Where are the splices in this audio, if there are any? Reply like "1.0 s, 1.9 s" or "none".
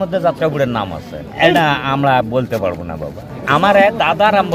1.3 s, 3.4 s